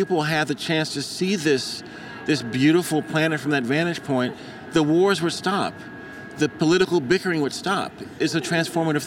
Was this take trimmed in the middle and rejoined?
yes; 1 cut; at 8.1 s

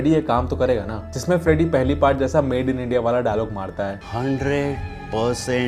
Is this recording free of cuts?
yes; 0 cuts

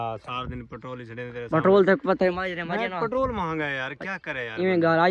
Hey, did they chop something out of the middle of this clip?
no; 0 cuts

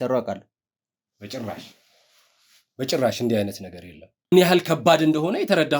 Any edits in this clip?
yes; 1 cut; at 4.3 s

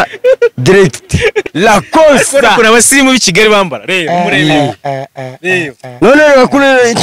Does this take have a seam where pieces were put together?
yes; 1 cut; at 1.4 s

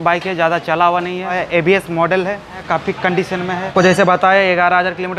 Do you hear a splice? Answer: yes; 3 cuts; at 1.4 s, 2.6 s, 3.7 s

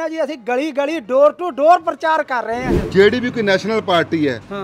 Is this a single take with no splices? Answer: no; 1 cut; at 2.7 s

